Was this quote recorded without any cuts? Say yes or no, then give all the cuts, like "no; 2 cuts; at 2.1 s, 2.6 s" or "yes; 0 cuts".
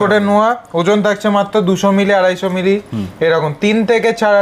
yes; 0 cuts